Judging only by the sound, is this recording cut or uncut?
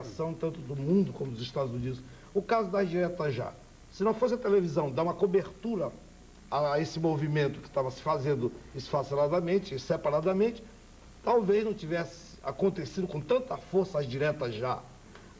cut